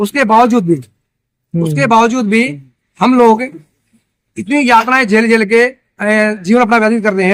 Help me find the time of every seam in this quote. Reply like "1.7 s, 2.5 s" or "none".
none